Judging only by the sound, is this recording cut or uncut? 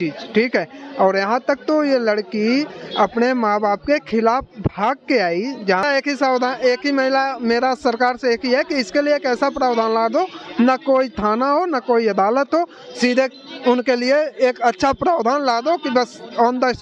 cut